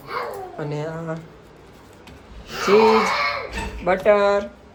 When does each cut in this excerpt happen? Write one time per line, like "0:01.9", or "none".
none